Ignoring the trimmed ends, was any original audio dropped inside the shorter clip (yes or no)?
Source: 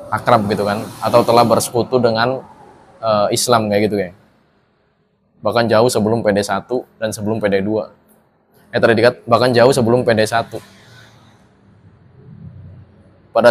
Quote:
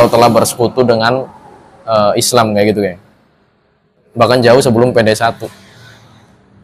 yes